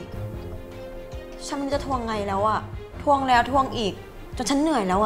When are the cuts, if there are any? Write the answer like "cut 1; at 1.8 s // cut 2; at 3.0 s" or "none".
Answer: none